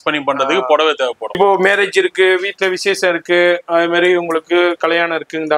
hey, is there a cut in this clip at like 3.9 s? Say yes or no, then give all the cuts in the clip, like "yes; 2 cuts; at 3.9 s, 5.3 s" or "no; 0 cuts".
no; 1 cut; at 1.4 s